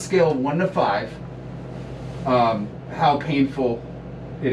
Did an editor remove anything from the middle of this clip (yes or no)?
no